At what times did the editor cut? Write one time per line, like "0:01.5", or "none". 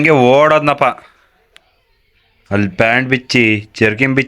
none